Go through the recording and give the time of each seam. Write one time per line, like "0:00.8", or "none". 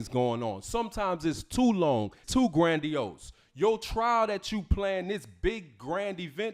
0:02.2